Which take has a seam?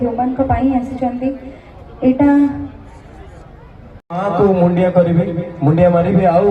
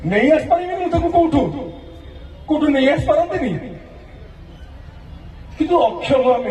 first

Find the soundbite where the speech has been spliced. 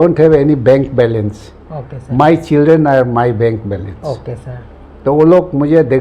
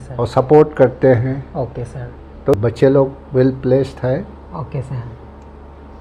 second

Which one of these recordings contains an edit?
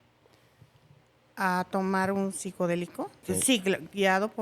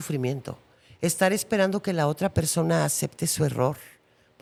first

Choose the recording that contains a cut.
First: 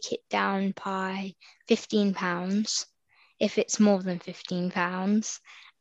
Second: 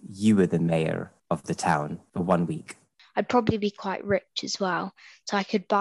second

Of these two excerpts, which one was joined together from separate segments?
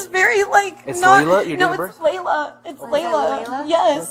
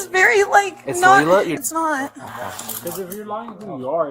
second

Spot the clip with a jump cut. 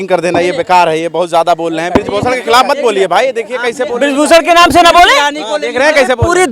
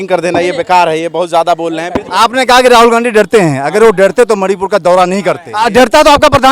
second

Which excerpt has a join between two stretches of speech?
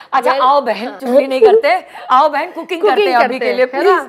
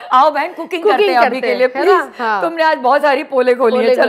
first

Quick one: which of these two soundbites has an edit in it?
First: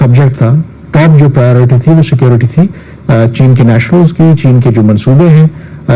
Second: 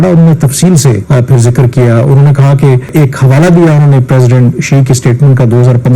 second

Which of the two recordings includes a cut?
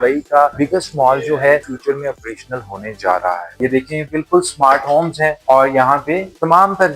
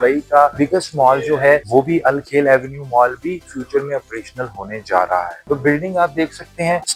first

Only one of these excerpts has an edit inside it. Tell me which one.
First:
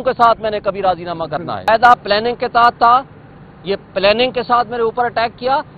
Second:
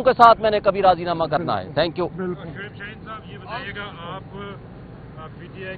first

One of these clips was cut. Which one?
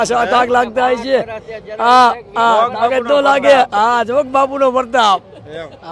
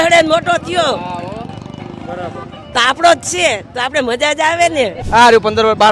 second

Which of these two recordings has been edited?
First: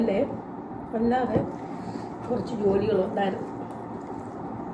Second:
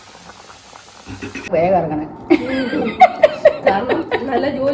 second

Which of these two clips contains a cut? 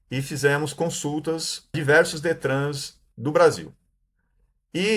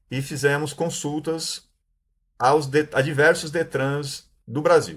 first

